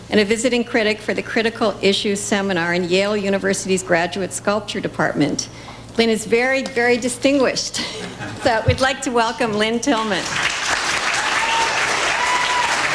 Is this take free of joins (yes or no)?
yes